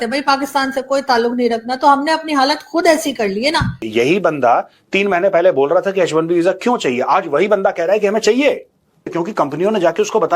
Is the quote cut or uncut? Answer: cut